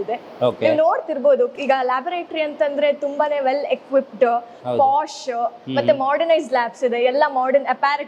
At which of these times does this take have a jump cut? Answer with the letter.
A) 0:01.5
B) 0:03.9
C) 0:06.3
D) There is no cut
A